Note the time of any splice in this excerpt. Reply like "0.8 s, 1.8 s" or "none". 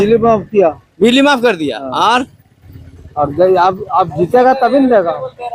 none